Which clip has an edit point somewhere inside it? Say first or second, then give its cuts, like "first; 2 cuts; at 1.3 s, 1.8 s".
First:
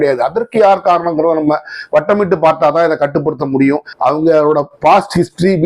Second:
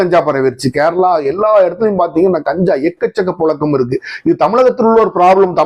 first; 1 cut; at 3.9 s